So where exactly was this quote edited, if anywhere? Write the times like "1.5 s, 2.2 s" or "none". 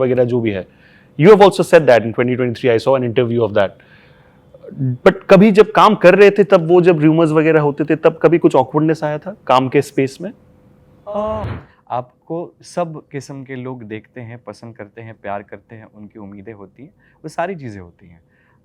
11.5 s